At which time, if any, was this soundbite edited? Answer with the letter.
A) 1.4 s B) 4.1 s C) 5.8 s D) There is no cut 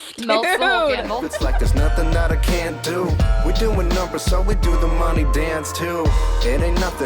A